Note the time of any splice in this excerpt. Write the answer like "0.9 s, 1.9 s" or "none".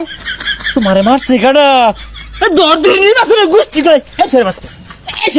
none